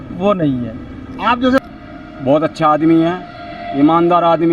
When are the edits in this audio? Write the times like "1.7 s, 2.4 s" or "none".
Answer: 1.6 s